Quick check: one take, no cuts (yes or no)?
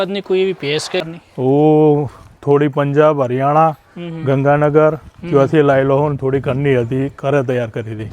no